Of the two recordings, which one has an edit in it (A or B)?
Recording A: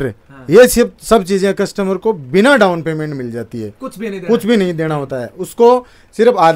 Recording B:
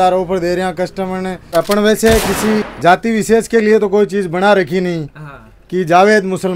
B